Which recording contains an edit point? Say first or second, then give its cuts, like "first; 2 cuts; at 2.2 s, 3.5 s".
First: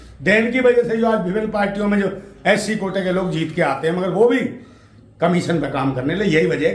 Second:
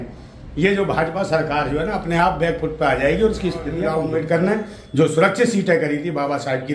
second; 1 cut; at 3.8 s